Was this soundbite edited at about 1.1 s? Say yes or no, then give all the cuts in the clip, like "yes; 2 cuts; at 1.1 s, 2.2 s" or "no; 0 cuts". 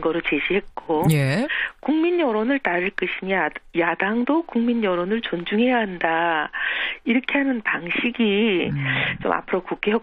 no; 1 cut; at 7.1 s